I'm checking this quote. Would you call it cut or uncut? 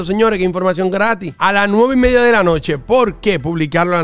uncut